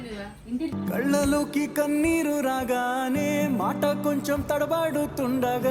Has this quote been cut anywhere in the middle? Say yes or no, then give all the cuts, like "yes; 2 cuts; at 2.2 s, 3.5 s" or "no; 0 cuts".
no; 0 cuts